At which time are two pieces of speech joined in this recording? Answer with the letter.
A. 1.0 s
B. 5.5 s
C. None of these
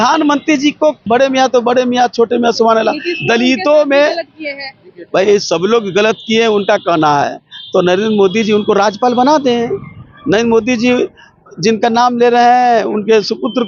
A